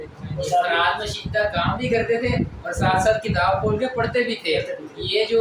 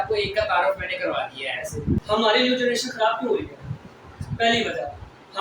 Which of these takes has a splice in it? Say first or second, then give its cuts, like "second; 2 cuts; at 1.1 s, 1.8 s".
second; 1 cut; at 2.0 s